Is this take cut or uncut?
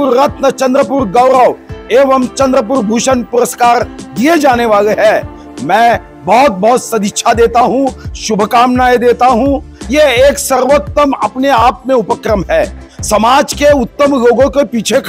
uncut